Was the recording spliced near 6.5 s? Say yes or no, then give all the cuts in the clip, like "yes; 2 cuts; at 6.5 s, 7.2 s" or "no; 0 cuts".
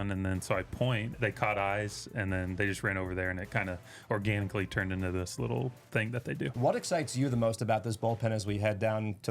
yes; 2 cuts; at 1.1 s, 6.5 s